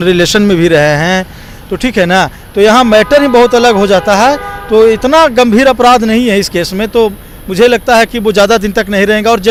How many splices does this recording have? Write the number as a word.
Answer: zero